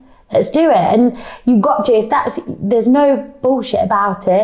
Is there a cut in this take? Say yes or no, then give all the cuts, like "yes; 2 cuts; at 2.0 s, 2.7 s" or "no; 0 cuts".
no; 0 cuts